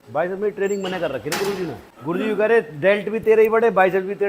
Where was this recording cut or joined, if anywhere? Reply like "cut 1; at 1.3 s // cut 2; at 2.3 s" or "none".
cut 1; at 1.9 s

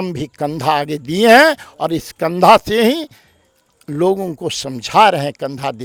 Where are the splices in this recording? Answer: none

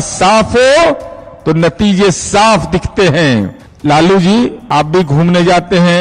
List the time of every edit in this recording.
cut 1; at 3.6 s // cut 2; at 4.6 s

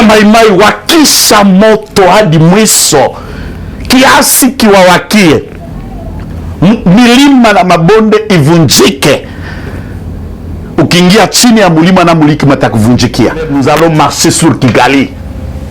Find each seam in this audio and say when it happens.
cut 1; at 13.5 s

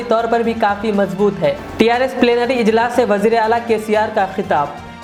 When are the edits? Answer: none

